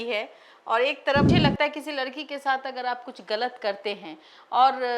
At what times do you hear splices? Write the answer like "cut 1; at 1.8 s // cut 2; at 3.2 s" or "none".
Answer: cut 1; at 1.3 s